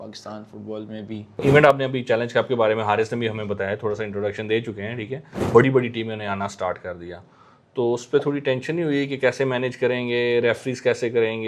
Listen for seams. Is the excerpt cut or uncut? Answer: cut